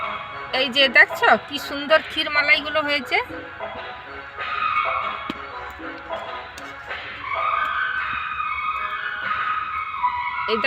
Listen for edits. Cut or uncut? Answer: uncut